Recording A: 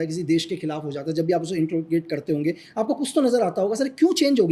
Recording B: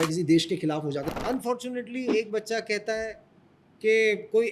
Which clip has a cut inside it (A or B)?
B